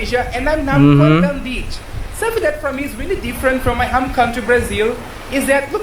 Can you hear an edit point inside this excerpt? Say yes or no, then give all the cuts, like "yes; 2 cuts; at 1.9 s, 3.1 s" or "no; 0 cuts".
no; 0 cuts